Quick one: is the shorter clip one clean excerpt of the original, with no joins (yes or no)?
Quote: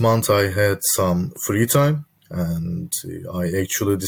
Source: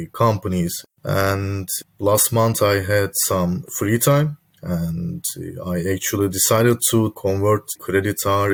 yes